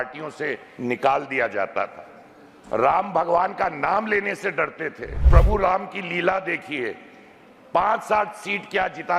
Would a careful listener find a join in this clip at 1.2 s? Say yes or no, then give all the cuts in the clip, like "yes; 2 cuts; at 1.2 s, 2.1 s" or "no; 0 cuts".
no; 1 cut; at 5.3 s